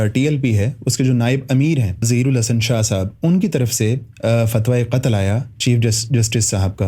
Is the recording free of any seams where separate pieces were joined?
no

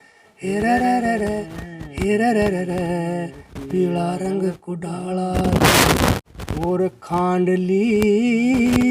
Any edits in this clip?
yes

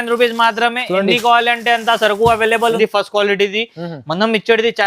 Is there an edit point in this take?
yes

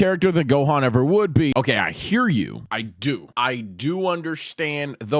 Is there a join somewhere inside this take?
yes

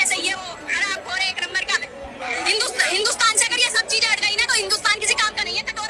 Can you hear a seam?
no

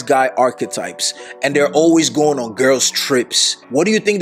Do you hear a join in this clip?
no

